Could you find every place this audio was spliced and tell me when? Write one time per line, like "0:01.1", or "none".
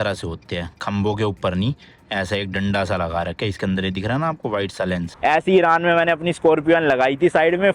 0:05.1